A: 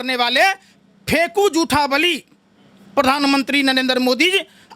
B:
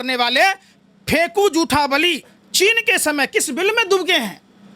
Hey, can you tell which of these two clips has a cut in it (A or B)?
B